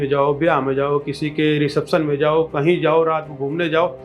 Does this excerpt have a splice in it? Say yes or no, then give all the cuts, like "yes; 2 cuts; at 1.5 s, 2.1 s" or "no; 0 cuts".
no; 0 cuts